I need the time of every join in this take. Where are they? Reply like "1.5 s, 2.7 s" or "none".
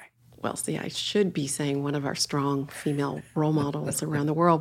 3.2 s